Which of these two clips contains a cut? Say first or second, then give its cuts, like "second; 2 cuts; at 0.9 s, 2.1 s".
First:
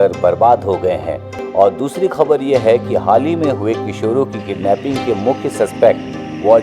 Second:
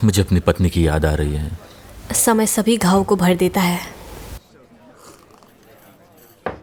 first; 1 cut; at 1.3 s